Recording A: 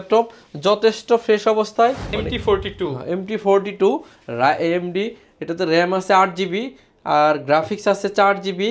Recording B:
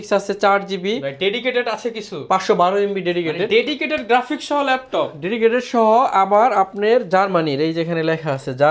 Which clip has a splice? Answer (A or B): A